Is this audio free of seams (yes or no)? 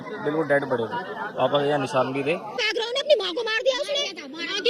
no